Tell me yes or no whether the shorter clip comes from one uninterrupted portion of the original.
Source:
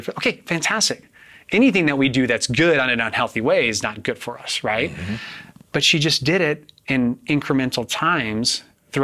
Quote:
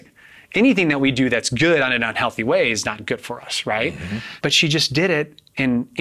no